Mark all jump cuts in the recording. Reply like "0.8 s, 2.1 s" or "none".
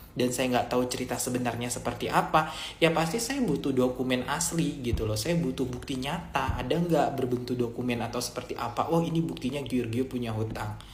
none